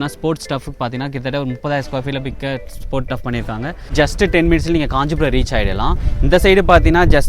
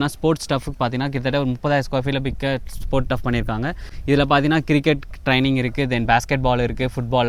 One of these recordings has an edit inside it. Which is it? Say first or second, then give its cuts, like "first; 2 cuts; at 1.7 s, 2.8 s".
first; 1 cut; at 3.9 s